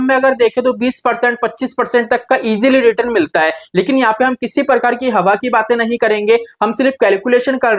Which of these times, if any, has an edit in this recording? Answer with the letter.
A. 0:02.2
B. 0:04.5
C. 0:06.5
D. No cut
D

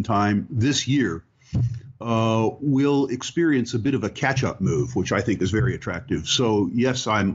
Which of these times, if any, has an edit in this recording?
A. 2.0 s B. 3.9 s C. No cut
B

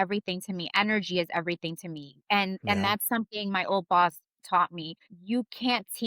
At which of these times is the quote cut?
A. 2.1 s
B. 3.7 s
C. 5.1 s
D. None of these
C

